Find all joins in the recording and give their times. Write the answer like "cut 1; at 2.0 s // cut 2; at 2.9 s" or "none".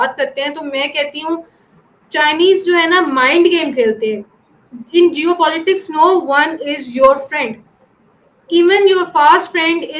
none